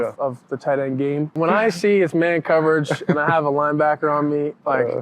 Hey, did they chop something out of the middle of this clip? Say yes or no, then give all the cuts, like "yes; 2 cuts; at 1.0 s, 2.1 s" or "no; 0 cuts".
yes; 1 cut; at 1.4 s